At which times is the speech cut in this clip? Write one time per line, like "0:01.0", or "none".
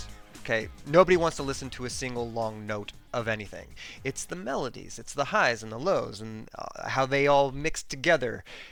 none